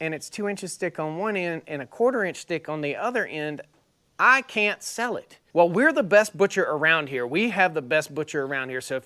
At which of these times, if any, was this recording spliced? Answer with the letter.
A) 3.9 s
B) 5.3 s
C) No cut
B